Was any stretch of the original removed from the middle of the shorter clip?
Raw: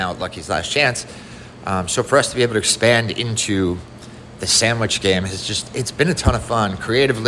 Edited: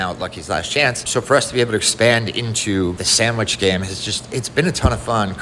yes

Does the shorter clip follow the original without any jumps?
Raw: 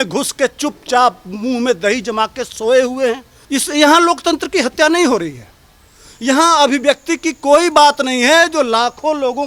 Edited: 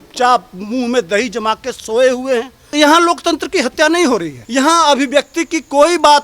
no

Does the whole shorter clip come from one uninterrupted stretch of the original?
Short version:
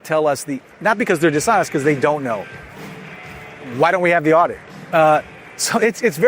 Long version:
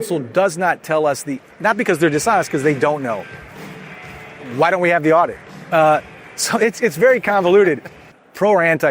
yes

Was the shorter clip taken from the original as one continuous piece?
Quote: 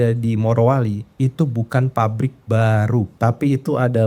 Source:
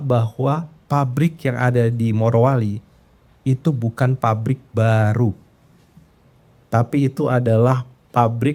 no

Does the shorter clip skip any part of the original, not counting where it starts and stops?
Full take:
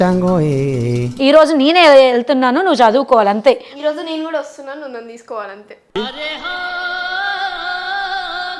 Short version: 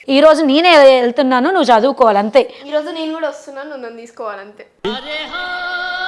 no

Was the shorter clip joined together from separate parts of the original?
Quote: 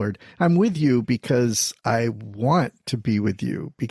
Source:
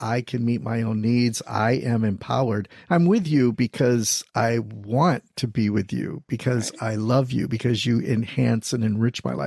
no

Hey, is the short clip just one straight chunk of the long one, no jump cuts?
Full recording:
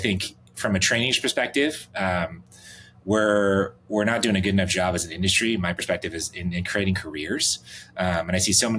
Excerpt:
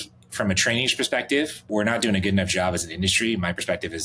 no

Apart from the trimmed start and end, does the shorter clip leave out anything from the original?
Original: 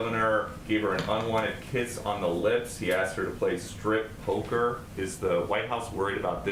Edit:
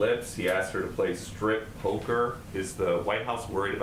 no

